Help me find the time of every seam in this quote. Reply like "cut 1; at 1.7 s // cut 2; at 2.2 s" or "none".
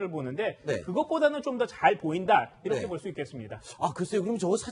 none